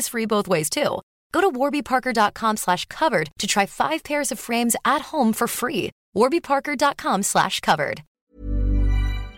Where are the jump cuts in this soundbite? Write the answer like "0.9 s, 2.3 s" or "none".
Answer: 8.1 s